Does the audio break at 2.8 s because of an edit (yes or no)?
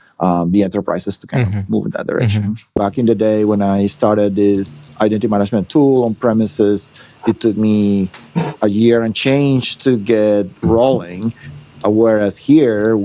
yes